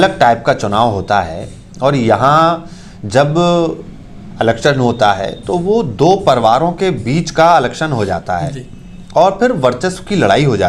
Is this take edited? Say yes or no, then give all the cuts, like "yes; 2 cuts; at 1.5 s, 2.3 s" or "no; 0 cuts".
no; 0 cuts